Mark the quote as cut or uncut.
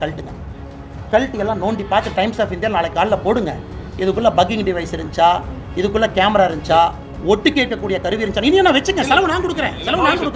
uncut